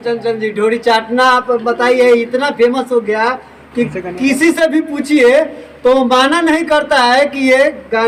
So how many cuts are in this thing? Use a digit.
0